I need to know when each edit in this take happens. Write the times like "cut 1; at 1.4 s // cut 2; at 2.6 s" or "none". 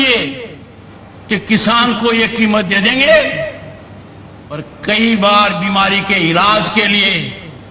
cut 1; at 4.6 s

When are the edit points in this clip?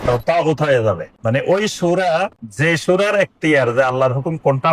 cut 1; at 1.1 s // cut 2; at 2.4 s

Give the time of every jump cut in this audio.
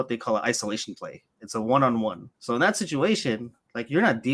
cut 1; at 2.3 s

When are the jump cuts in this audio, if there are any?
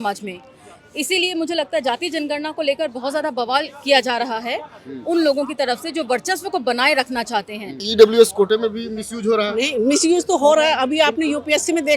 cut 1; at 7.8 s

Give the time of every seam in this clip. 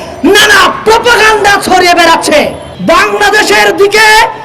cut 1; at 2.6 s

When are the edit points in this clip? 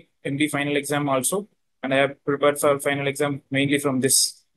cut 1; at 3.4 s

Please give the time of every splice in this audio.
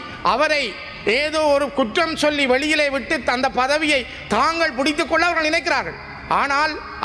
none

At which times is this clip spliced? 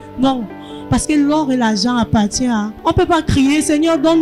cut 1; at 2.7 s

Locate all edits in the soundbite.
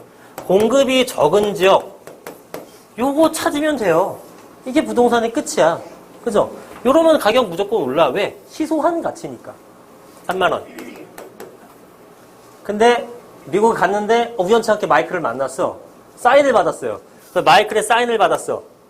cut 1; at 10.1 s

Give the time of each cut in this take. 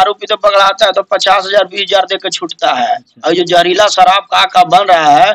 cut 1; at 3.1 s

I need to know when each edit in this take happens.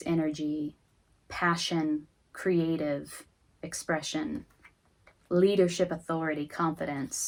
none

